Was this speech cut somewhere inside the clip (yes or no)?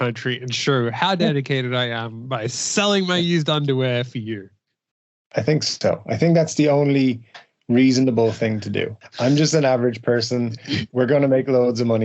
yes